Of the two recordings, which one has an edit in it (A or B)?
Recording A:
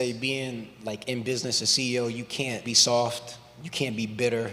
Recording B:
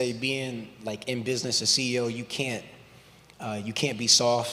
A